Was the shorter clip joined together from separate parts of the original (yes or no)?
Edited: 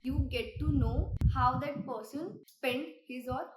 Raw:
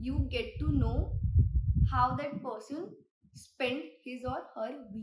yes